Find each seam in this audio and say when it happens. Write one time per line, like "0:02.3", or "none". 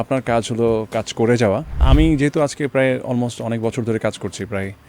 0:01.8